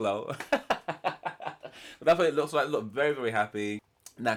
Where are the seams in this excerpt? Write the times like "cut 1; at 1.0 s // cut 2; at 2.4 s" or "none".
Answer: none